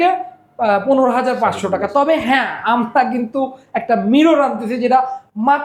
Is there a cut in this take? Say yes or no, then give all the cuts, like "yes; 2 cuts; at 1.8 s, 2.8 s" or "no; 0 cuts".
no; 0 cuts